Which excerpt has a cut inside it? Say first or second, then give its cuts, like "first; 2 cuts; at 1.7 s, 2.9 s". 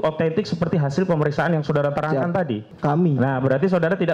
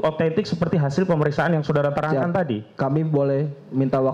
first; 1 cut; at 2.7 s